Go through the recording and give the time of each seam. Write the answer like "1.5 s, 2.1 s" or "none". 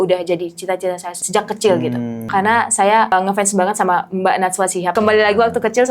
1.1 s, 2.2 s, 3.1 s, 4.9 s